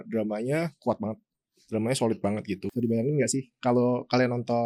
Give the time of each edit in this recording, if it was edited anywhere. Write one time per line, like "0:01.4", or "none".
none